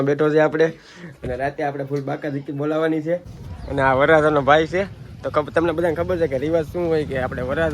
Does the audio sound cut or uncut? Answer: cut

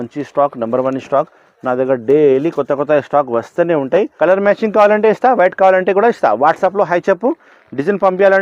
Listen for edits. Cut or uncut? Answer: cut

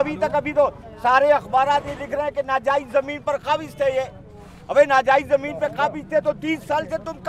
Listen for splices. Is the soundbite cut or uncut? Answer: uncut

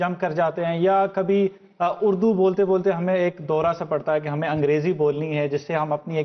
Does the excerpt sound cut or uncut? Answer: cut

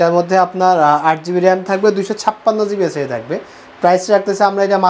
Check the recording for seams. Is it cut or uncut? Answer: uncut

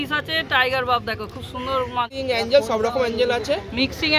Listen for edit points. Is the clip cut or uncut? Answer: cut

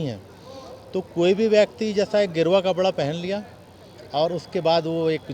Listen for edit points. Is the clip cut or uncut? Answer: uncut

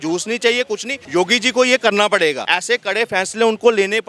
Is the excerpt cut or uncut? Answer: cut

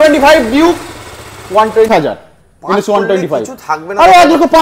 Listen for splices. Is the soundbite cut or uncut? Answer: cut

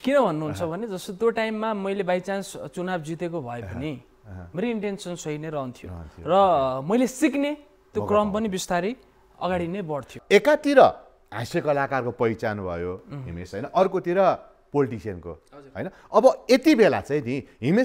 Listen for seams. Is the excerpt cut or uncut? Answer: cut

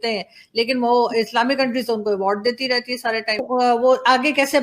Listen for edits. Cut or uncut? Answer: cut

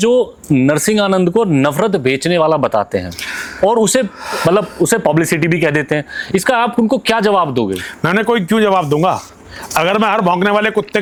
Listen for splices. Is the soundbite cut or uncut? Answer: uncut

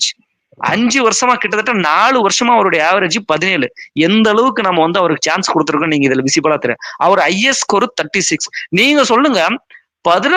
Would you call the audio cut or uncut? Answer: uncut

